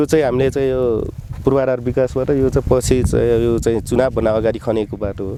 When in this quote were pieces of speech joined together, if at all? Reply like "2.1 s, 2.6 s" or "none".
none